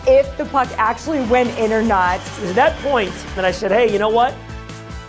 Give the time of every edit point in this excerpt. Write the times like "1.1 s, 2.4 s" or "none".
2.3 s, 3.3 s